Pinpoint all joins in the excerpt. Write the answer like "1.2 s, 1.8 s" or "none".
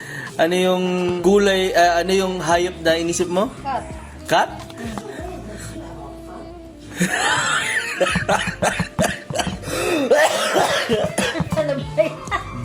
1.2 s